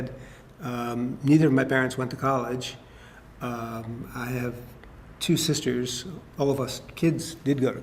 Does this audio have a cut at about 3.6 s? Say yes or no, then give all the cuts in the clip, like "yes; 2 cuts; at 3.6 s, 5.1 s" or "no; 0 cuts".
yes; 1 cut; at 3.6 s